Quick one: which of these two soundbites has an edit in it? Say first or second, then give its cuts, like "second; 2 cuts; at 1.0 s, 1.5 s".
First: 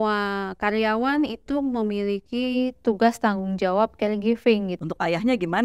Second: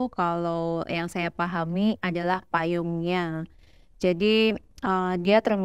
first; 1 cut; at 4.7 s